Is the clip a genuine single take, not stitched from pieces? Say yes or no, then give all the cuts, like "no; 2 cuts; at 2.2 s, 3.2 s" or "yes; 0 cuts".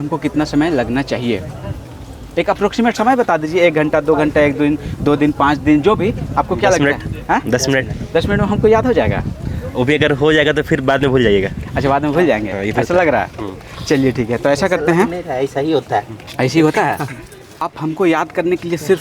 no; 1 cut; at 17.7 s